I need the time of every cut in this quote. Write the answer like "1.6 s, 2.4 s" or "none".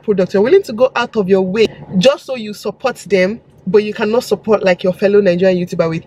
1.7 s